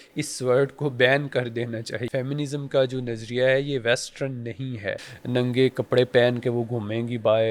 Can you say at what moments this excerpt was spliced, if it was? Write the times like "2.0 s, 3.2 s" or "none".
2.0 s, 5.1 s